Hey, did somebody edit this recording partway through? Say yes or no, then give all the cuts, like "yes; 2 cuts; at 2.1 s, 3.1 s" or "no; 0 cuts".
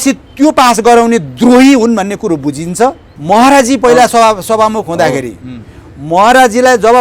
yes; 1 cut; at 3.1 s